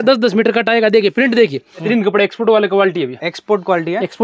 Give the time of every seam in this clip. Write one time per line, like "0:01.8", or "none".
0:01.9